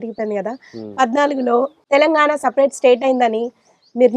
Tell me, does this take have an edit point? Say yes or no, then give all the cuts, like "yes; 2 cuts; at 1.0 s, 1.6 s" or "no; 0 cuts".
yes; 1 cut; at 1.8 s